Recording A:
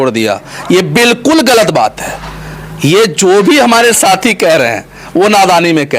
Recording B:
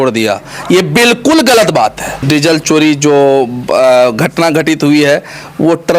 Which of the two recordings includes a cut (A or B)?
B